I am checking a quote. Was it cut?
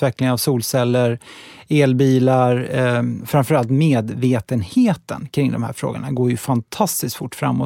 yes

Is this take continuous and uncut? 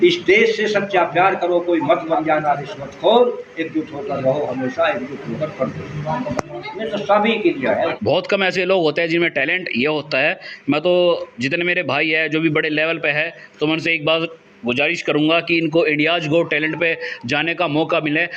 no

